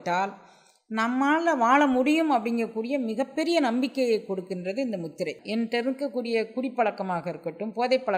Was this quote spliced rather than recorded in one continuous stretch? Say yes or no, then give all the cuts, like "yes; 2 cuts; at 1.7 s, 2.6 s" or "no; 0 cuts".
yes; 1 cut; at 5.4 s